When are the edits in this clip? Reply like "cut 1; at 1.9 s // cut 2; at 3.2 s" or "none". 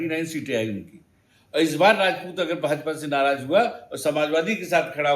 none